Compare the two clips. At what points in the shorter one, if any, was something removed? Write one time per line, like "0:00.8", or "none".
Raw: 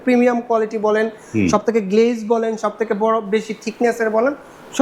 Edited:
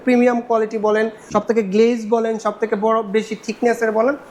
0:01.3